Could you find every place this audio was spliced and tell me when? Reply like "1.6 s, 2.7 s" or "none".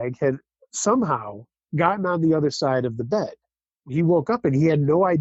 none